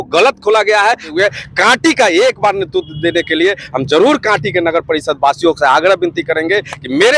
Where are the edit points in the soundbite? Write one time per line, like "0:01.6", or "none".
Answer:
0:01.1